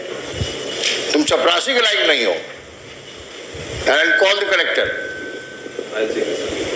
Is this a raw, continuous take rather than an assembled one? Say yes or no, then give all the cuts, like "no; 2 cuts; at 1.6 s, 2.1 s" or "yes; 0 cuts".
no; 1 cut; at 3.8 s